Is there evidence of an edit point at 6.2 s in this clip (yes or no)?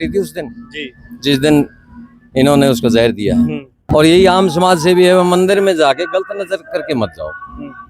no